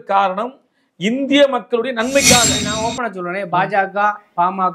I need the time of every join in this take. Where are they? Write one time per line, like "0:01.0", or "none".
0:02.6